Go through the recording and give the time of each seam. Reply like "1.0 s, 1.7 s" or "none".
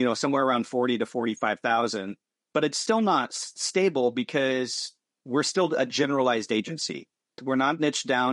2.8 s, 7.4 s